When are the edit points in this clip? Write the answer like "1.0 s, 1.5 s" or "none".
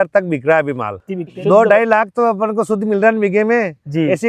1.3 s